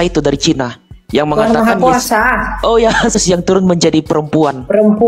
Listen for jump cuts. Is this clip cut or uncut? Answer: cut